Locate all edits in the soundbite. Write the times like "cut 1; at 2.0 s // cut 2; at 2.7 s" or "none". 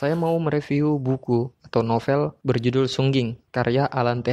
cut 1; at 1.6 s // cut 2; at 2.4 s // cut 3; at 3.4 s